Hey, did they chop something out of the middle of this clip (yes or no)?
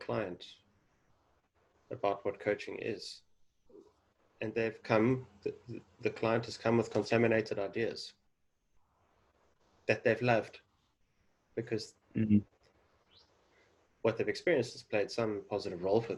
no